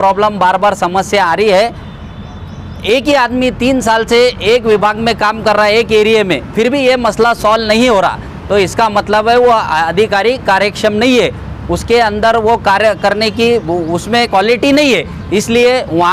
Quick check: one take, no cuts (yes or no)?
yes